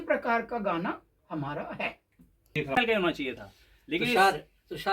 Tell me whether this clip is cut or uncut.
cut